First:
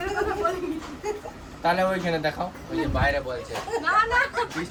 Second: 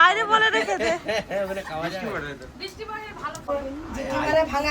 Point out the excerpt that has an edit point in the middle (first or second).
second